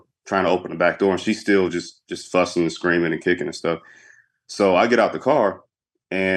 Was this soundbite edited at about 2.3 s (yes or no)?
no